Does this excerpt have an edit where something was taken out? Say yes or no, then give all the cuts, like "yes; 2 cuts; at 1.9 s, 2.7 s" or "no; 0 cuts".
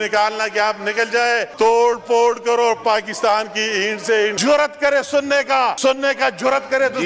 yes; 3 cuts; at 1.5 s, 4.4 s, 5.8 s